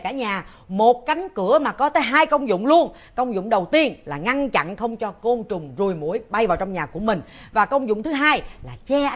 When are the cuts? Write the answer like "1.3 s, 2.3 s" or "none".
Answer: none